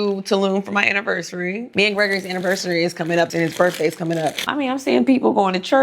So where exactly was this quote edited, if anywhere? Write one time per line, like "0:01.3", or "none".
0:01.6
0:04.4

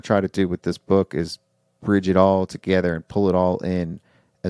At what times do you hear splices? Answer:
none

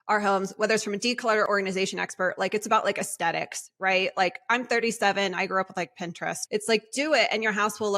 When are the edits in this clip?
0:01.5
0:06.4

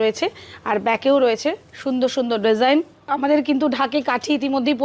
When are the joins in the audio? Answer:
0:03.1

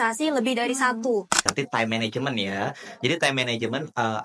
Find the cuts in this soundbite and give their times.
0:01.5

